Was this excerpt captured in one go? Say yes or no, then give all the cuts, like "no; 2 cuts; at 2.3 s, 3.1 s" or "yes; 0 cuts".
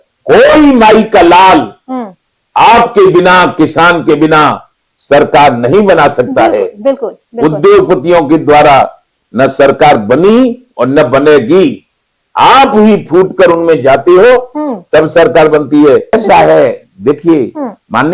no; 1 cut; at 16.1 s